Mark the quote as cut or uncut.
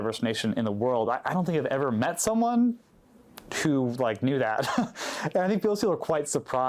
uncut